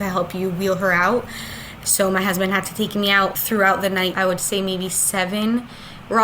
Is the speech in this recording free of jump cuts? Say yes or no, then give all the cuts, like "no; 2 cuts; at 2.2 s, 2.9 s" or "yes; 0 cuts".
no; 2 cuts; at 3.3 s, 4.1 s